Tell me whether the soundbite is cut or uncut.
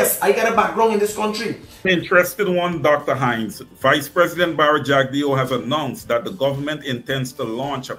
cut